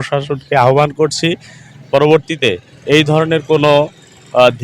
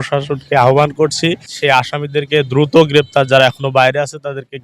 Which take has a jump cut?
second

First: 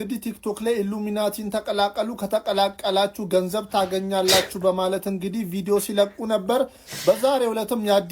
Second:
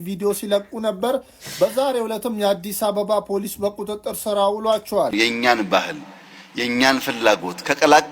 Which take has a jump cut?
second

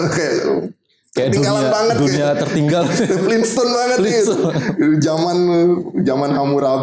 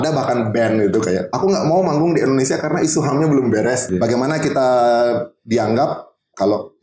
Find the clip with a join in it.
second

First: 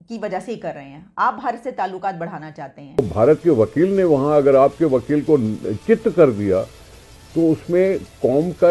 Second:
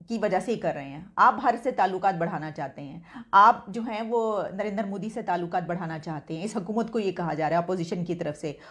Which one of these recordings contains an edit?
first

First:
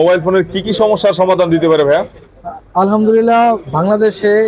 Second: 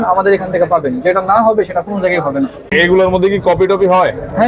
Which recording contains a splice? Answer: second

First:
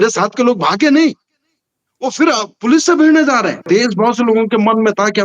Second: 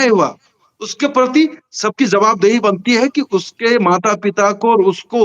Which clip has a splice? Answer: first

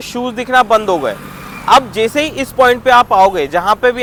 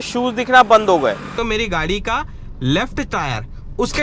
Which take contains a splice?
second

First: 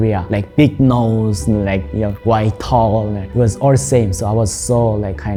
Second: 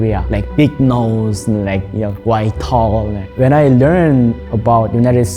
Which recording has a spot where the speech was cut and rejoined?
second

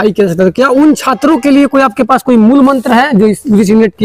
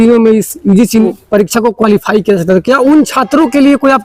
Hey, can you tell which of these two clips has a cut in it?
second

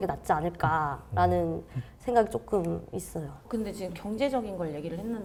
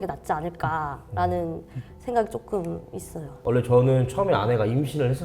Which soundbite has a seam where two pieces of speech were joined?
second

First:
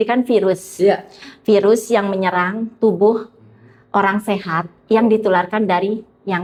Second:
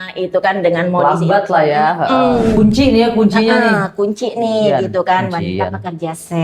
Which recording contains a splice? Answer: second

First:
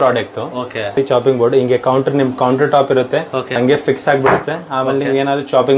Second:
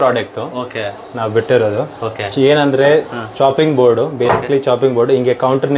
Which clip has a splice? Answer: first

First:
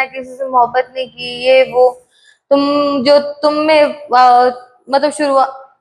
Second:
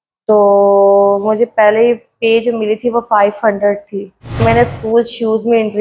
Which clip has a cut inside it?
second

